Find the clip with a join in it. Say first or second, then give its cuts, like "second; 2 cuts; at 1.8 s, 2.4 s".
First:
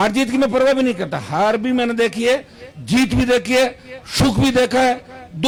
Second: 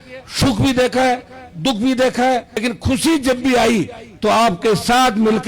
second; 1 cut; at 2.6 s